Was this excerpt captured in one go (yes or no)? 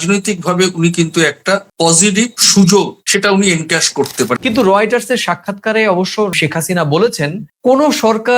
no